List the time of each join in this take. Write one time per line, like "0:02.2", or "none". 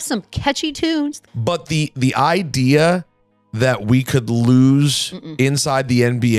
0:01.2